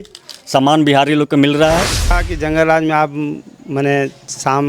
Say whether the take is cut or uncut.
cut